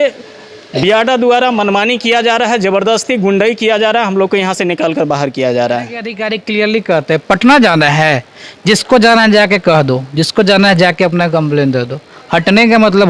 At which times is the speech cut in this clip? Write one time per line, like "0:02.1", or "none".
0:06.2